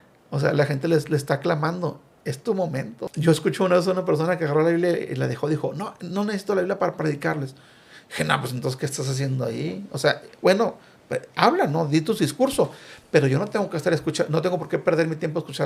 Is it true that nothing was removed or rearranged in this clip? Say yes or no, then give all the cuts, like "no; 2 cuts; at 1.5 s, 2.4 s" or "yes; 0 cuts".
no; 1 cut; at 3.1 s